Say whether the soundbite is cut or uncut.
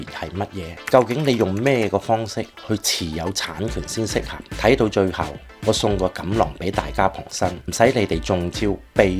cut